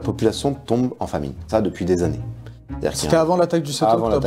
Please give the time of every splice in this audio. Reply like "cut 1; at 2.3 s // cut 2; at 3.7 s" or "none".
none